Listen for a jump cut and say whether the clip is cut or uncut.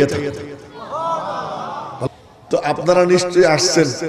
cut